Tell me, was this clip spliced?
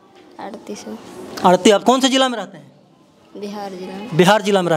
no; 0 cuts

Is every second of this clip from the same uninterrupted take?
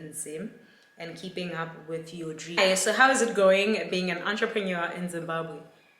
no; 1 cut; at 2.5 s

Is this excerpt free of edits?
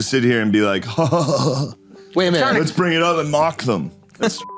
yes; 0 cuts

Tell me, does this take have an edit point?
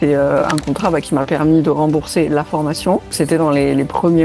yes; 1 cut; at 3.1 s

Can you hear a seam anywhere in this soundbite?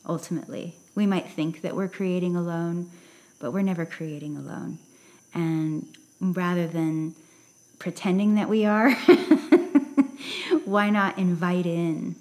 no; 0 cuts

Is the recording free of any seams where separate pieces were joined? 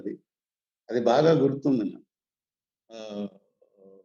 yes; 0 cuts

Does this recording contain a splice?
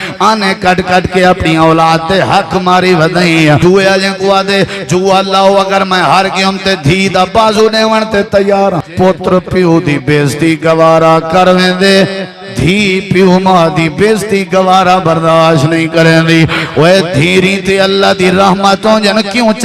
yes; 2 cuts; at 3.6 s, 8.9 s

